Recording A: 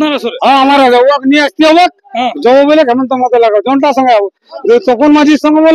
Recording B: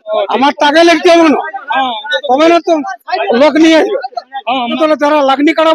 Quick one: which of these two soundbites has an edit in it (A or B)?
B